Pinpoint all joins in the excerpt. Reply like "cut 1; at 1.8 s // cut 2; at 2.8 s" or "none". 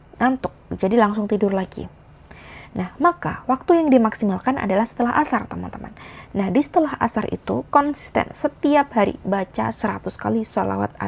none